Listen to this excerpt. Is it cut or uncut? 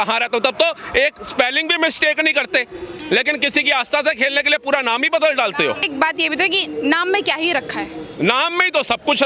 cut